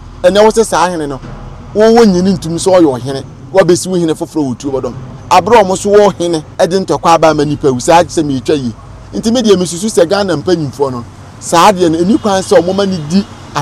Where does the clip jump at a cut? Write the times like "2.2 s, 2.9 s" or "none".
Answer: 6.5 s